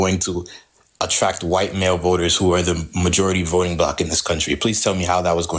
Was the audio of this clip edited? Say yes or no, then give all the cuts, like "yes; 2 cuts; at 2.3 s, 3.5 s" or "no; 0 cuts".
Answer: no; 0 cuts